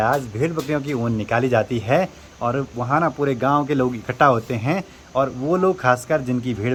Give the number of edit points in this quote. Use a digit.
0